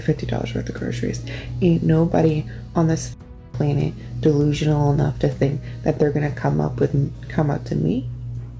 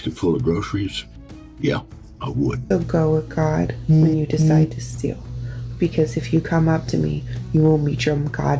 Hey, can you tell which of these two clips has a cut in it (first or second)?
second